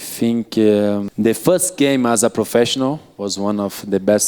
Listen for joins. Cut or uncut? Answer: cut